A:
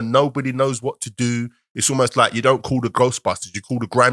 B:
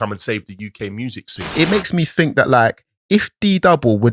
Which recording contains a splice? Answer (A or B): B